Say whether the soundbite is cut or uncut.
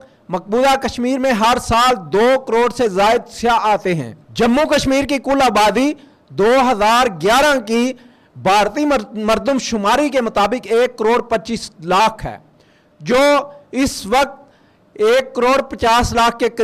uncut